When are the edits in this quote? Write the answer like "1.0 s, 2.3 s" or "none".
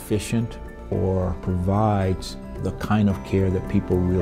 none